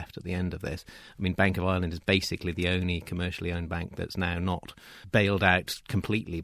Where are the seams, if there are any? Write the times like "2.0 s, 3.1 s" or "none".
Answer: none